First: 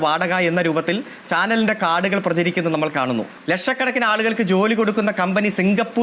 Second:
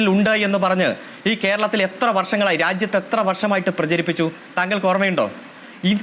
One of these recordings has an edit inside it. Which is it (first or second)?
first